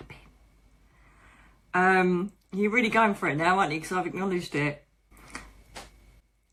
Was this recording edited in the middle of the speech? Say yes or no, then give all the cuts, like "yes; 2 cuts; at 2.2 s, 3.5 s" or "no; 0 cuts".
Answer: no; 0 cuts